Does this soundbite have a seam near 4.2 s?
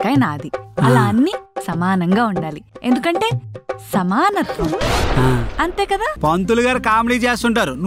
no; 1 cut; at 6.1 s

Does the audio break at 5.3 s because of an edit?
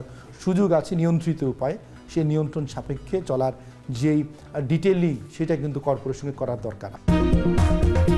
no; 1 cut; at 6.9 s

